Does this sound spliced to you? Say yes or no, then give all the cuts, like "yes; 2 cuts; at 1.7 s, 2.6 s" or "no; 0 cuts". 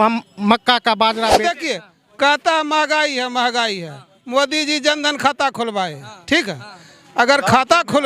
yes; 1 cut; at 1.5 s